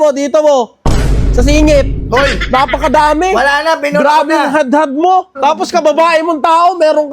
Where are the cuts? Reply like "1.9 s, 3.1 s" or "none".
5.3 s